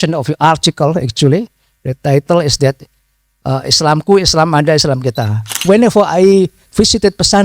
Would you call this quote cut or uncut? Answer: cut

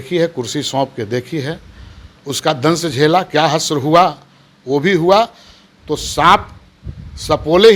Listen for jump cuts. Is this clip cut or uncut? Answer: uncut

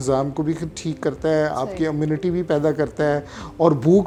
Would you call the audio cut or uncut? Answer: uncut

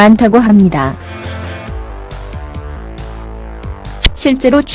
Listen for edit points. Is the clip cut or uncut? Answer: cut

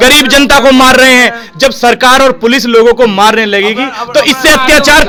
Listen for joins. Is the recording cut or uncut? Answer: uncut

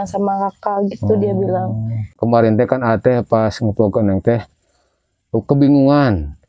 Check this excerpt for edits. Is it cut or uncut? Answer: cut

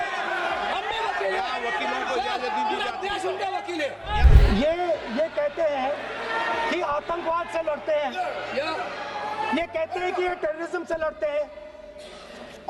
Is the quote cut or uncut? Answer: cut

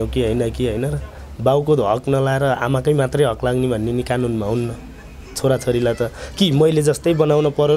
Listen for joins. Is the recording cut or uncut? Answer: uncut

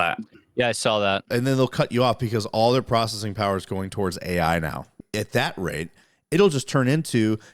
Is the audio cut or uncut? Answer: cut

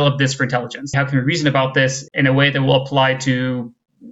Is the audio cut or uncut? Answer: cut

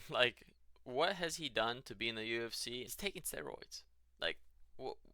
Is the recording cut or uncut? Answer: cut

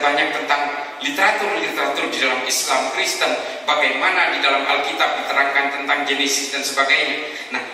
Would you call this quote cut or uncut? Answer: uncut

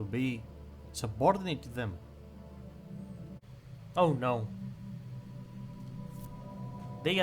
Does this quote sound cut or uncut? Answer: cut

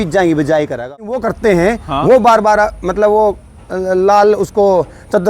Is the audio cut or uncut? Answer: cut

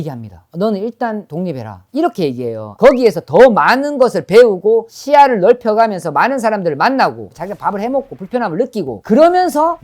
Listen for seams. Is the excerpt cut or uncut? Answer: cut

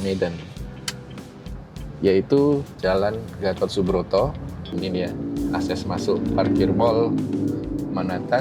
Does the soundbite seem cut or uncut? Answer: cut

